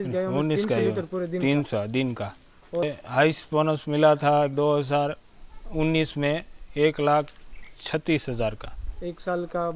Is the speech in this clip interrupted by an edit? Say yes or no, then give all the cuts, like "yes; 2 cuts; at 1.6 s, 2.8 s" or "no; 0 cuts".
yes; 1 cut; at 2.8 s